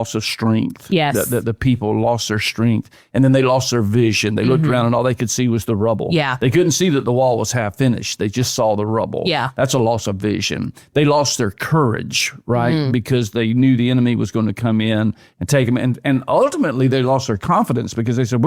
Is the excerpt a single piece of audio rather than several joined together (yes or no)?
yes